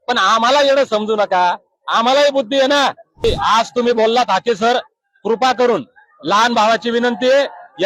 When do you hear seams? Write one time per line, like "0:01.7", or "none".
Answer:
0:03.2